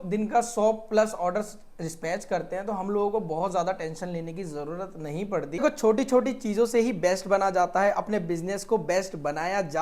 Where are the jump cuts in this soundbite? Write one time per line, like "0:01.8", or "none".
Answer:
0:05.6